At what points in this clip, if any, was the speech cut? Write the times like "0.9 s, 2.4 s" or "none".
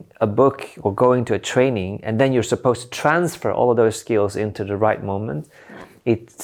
none